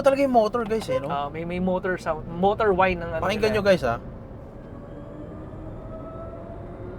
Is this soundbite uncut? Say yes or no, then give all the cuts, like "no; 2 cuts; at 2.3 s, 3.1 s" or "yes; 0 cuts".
yes; 0 cuts